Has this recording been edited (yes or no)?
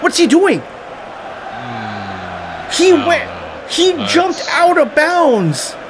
no